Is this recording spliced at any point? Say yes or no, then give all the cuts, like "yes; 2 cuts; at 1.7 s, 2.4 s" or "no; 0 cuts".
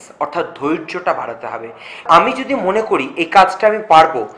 yes; 1 cut; at 2.0 s